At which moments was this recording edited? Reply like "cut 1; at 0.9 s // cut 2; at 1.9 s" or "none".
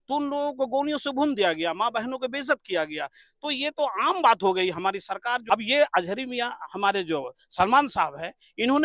cut 1; at 5.4 s